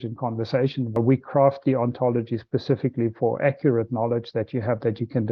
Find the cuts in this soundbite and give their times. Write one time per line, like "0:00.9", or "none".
0:01.0

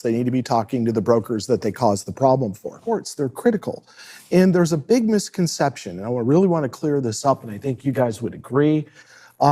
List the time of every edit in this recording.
0:02.7

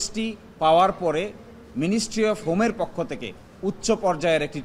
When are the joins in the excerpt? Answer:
none

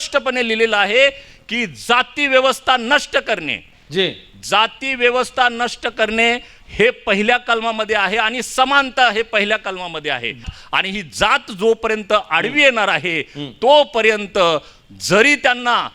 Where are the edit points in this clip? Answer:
0:10.4

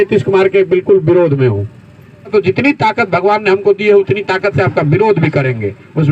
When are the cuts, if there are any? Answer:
0:02.3

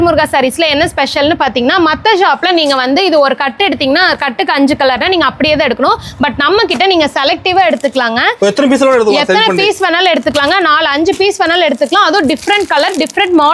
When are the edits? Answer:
none

